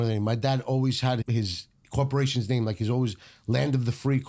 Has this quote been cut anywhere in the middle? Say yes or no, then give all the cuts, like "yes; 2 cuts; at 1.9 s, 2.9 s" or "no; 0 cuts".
yes; 1 cut; at 1.2 s